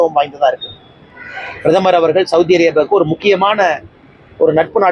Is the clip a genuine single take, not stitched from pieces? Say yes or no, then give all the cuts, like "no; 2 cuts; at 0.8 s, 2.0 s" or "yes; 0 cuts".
yes; 0 cuts